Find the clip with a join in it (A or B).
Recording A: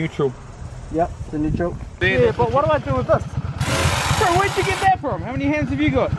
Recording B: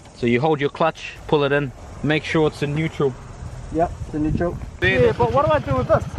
B